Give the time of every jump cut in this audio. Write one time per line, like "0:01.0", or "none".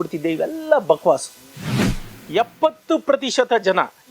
0:01.8

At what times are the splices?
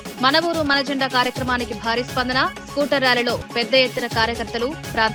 none

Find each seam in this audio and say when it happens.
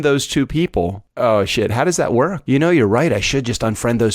0:01.0
0:02.4

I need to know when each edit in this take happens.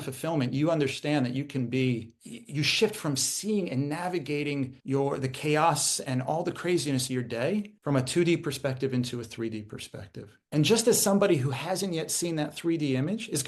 none

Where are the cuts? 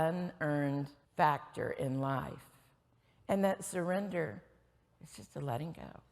0:01.0

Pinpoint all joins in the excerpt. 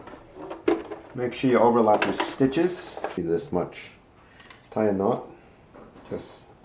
0:03.2

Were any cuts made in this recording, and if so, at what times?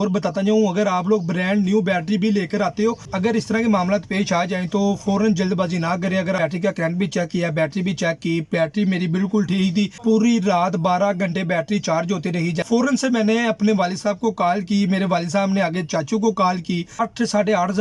0:03.0
0:06.2
0:10.0
0:12.7
0:16.9

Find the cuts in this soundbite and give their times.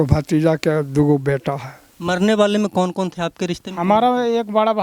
0:02.2

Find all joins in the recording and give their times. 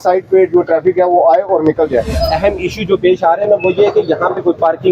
0:02.2

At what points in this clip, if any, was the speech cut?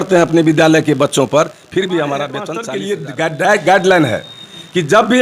0:02.6

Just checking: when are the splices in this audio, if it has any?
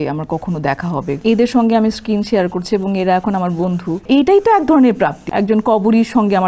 0:01.2
0:04.0
0:05.2

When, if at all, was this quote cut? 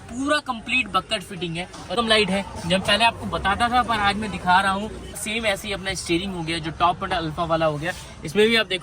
0:01.9
0:05.2

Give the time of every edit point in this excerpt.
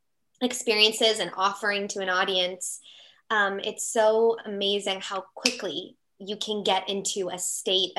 none

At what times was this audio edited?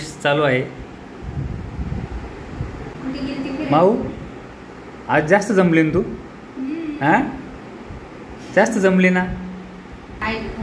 none

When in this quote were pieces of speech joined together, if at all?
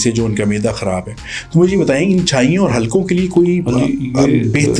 none

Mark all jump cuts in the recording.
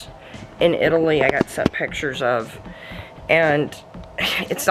none

